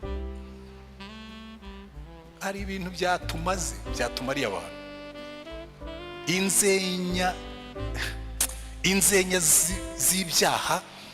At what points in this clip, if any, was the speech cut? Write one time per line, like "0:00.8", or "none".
0:02.3